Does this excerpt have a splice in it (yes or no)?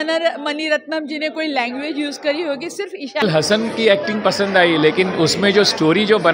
yes